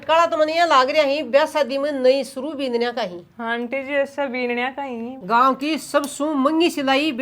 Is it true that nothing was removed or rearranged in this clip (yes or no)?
no